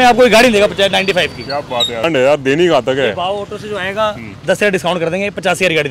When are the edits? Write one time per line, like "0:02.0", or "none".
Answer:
0:02.0